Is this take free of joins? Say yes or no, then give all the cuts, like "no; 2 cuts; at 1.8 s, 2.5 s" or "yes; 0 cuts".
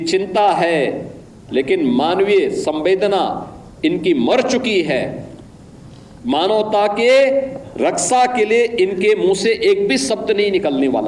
yes; 0 cuts